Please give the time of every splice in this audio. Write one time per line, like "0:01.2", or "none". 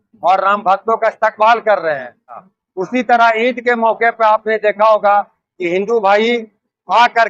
0:02.5